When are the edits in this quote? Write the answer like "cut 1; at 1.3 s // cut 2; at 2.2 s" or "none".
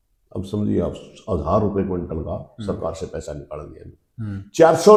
none